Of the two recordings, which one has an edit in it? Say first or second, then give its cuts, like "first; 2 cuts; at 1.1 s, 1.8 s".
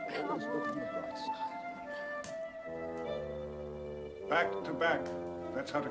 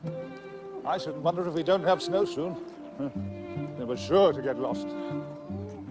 second; 1 cut; at 2.8 s